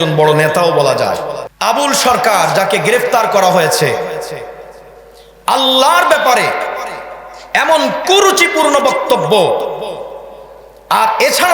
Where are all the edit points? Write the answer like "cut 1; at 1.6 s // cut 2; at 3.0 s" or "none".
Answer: cut 1; at 1.4 s